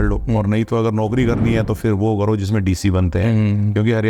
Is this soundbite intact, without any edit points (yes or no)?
yes